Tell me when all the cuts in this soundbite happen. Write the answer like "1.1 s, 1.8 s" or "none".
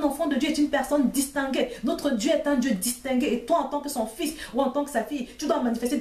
none